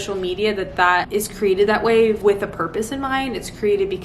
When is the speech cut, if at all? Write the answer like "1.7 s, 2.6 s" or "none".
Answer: 1.1 s, 2.2 s